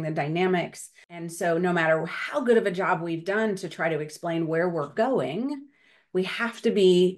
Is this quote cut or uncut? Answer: cut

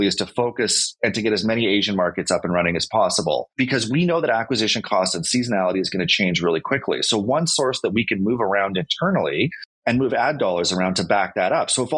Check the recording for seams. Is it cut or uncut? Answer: uncut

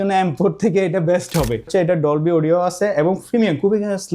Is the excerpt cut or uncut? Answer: cut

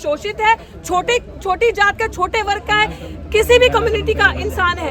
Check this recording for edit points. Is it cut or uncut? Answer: uncut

